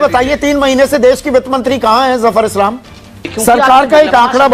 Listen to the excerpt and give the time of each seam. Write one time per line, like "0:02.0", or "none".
0:03.3